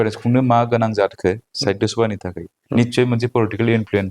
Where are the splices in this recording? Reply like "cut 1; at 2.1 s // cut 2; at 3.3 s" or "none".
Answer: none